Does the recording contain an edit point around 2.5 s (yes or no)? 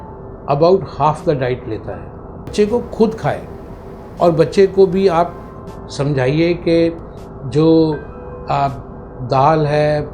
yes